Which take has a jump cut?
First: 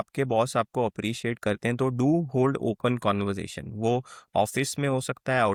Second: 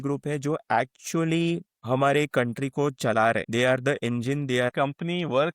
second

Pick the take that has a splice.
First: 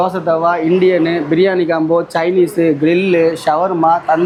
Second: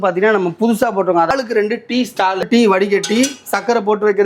second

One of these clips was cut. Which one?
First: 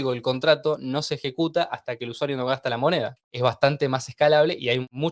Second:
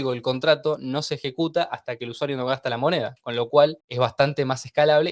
first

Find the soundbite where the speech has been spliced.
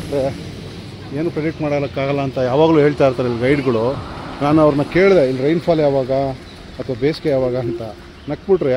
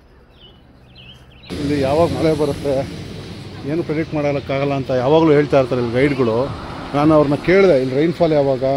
second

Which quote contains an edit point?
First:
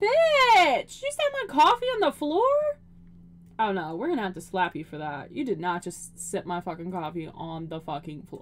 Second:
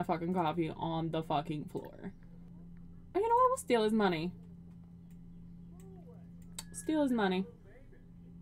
second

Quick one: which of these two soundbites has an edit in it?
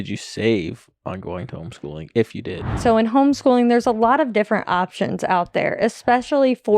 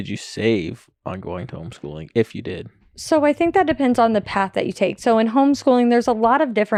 first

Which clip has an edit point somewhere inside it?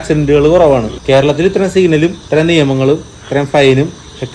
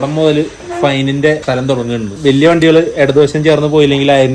second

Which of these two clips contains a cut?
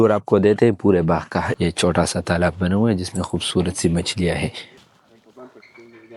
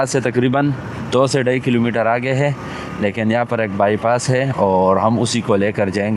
first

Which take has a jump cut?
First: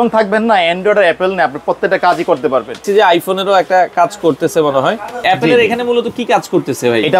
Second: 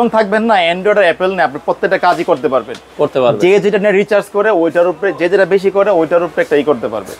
first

